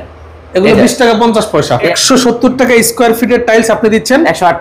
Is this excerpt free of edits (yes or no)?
no